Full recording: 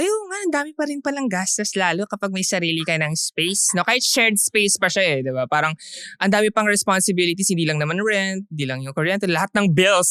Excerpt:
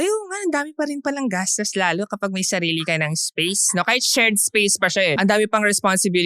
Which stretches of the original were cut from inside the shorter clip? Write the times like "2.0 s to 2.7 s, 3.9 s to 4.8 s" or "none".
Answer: 5.2 s to 6.2 s